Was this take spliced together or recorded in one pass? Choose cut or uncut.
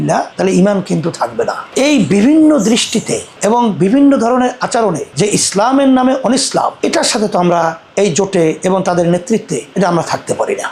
uncut